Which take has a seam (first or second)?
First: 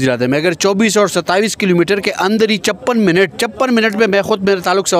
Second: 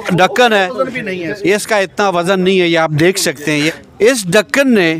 second